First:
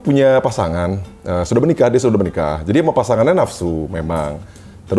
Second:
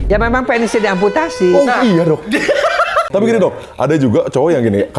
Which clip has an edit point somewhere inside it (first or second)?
second